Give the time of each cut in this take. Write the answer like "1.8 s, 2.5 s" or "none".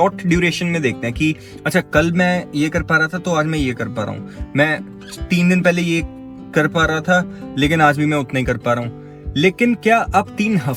none